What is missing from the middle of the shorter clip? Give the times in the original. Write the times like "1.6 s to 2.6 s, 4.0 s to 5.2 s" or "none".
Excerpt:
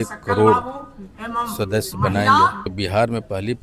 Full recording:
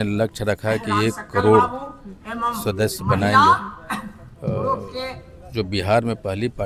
3.8 s to 5.7 s